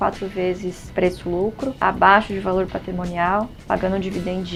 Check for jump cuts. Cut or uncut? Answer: uncut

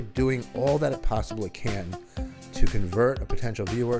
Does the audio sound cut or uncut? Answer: uncut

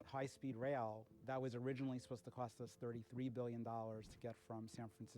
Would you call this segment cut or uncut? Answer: cut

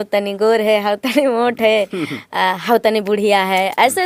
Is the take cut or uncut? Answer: uncut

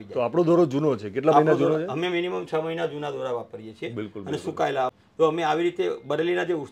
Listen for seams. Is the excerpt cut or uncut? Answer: cut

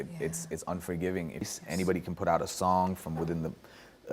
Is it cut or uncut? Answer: cut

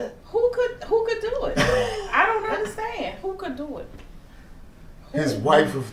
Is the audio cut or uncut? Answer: uncut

